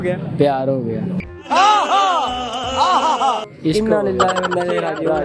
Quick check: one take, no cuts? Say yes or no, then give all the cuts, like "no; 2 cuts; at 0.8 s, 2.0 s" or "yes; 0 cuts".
no; 1 cut; at 3.5 s